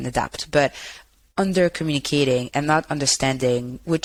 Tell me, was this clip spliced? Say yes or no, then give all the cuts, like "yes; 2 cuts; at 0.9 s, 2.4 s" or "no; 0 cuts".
no; 0 cuts